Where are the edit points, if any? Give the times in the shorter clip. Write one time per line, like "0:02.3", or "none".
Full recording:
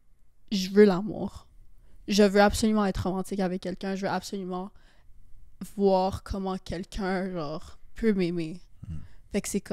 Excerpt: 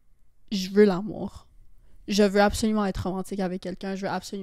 none

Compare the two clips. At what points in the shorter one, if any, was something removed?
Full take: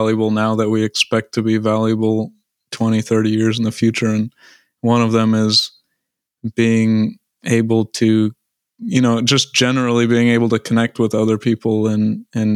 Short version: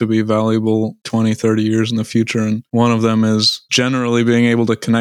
0:01.0
0:02.6
0:03.7

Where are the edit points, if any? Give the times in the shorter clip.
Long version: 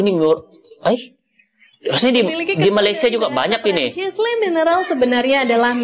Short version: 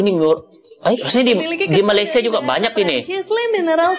0:01.0

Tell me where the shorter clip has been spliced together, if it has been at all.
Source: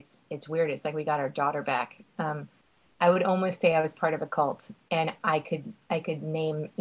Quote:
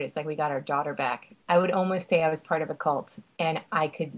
0:01.3

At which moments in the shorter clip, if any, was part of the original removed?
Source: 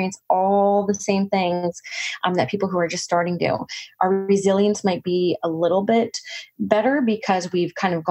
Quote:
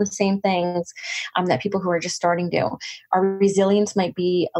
none

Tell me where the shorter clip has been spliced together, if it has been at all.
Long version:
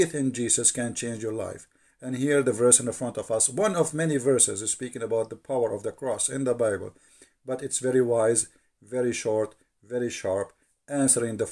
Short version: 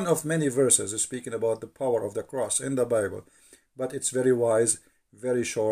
none

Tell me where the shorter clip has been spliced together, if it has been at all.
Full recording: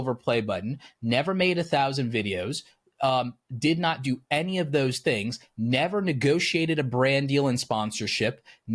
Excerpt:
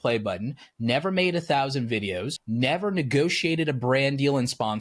0:02.4

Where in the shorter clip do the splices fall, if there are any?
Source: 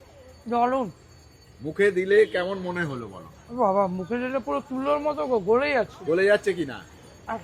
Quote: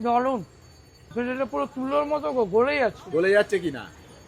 0:01.1

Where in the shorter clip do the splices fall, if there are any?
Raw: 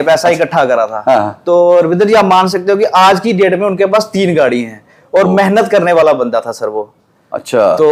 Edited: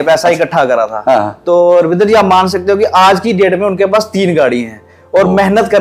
none

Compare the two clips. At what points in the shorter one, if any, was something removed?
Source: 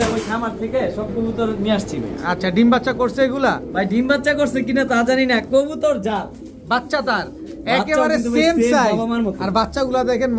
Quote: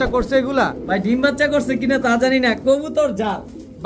none

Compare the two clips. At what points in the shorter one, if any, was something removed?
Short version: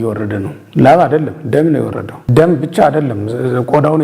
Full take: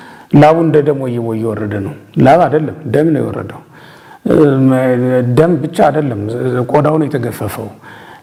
0:02.3

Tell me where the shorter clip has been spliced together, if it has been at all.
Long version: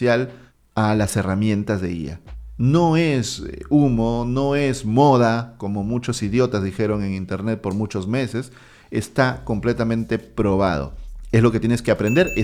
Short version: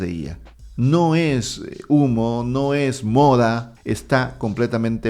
0:03.7

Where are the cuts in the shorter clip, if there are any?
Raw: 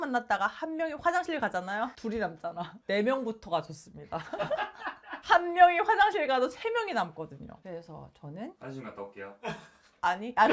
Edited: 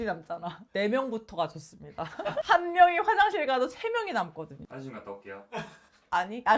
0:02.4
0:04.7

